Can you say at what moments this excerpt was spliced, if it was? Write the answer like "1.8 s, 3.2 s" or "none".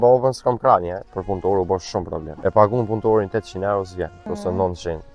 1.1 s, 2.2 s, 4.2 s